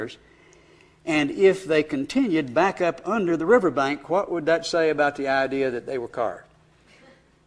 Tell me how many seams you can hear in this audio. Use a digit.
0